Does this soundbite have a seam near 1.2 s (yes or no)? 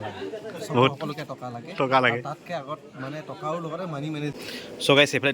no